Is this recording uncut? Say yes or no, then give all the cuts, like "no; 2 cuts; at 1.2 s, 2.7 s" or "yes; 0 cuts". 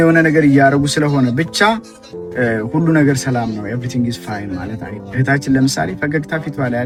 yes; 0 cuts